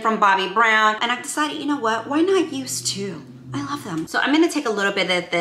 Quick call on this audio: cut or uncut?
cut